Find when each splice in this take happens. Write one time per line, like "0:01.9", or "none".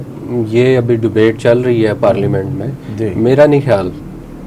none